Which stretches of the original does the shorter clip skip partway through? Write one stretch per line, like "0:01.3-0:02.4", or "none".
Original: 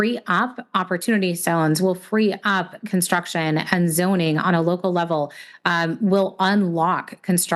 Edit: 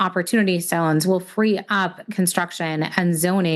none